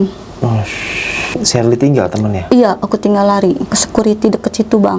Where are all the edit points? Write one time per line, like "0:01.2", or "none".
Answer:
0:01.3
0:03.7